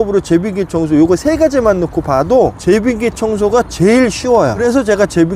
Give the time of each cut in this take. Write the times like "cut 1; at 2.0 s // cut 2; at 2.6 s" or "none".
cut 1; at 2.6 s // cut 2; at 4.6 s